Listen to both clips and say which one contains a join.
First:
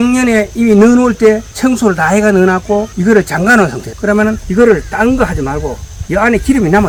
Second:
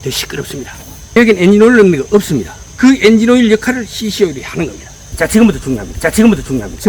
second; 2 cuts; at 1.2 s, 5.2 s

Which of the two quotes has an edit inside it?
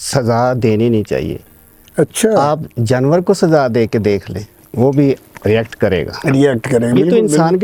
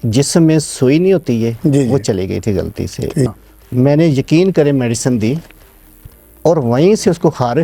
second; 1 cut; at 3.3 s

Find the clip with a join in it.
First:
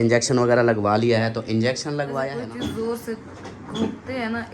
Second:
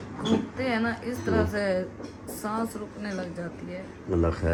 first; 1 cut; at 2.3 s

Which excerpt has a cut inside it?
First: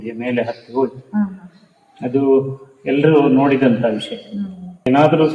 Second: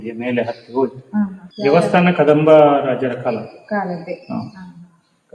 second; 1 cut; at 1.4 s

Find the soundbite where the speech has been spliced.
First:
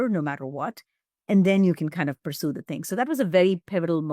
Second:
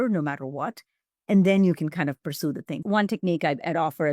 second; 1 cut; at 2.8 s

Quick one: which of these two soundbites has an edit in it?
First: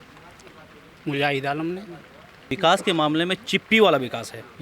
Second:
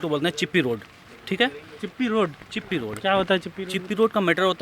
first; 1 cut; at 2.5 s

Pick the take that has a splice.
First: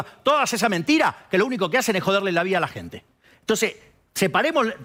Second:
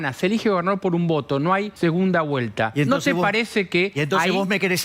second; 1 cut; at 1.7 s

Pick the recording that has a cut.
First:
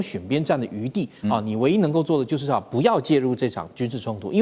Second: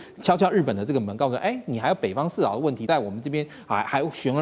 second; 1 cut; at 2.8 s

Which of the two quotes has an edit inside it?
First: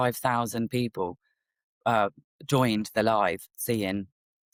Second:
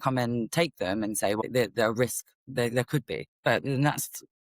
second; 2 cuts; at 1.4 s, 3.3 s

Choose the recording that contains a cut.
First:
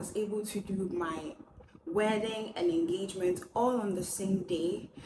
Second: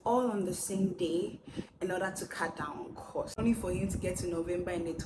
second; 1 cut; at 3.3 s

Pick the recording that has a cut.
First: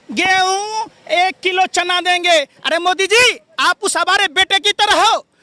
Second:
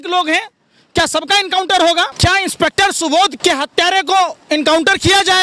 second; 2 cuts; at 2.1 s, 3.3 s

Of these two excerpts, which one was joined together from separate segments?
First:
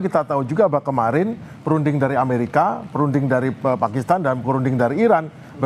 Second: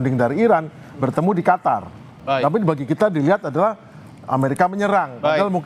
second; 1 cut; at 2.2 s

